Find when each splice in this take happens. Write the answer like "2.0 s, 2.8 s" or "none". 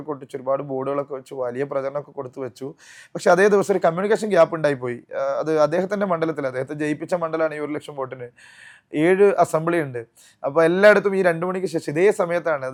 none